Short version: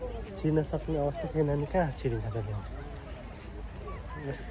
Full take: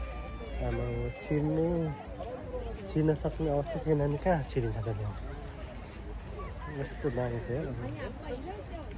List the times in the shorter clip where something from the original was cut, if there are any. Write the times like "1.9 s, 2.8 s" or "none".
none